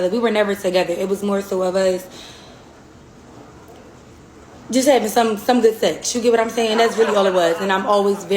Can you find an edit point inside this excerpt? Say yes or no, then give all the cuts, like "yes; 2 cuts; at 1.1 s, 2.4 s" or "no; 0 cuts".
yes; 1 cut; at 6.5 s